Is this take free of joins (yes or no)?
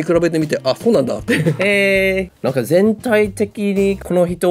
yes